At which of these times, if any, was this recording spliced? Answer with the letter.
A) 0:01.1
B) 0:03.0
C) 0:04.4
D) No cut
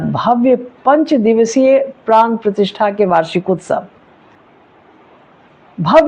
C